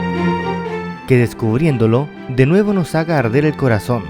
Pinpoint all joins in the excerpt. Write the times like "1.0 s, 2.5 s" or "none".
0.9 s